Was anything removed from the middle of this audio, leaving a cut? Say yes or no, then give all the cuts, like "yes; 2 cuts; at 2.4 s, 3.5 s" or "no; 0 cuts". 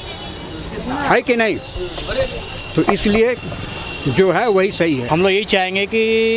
yes; 1 cut; at 5.0 s